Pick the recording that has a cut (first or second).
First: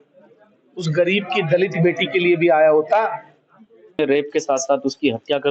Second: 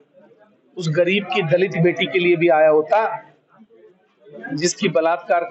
first